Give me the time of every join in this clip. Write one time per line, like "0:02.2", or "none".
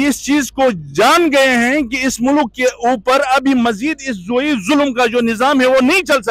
none